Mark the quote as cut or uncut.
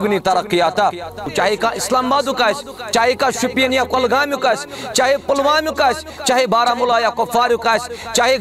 cut